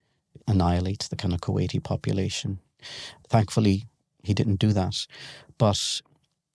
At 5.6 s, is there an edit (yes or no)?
no